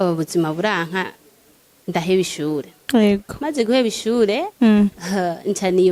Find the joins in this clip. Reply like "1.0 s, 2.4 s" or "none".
none